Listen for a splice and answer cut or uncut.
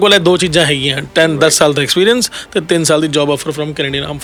uncut